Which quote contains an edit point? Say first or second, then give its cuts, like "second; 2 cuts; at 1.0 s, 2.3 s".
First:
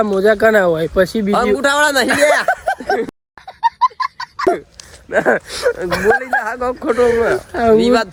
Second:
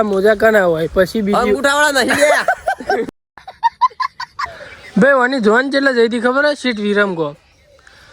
second; 1 cut; at 4.3 s